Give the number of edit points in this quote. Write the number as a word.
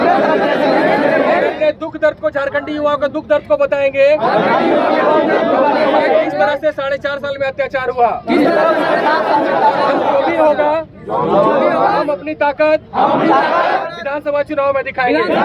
zero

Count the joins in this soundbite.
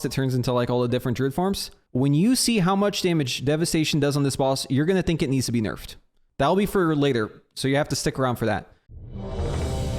three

